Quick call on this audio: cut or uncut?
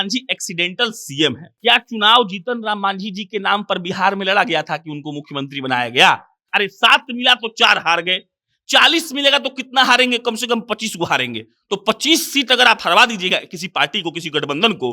cut